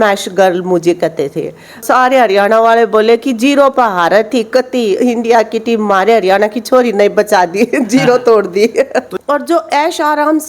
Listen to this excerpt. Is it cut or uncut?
cut